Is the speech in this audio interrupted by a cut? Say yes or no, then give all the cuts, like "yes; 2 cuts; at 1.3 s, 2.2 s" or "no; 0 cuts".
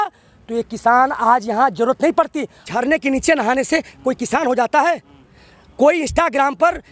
yes; 1 cut; at 2.7 s